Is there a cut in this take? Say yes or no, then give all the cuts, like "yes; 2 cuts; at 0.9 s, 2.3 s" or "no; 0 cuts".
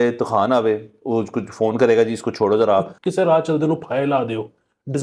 yes; 1 cut; at 3.0 s